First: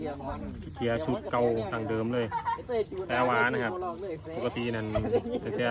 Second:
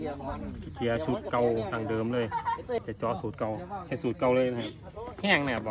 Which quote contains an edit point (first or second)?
second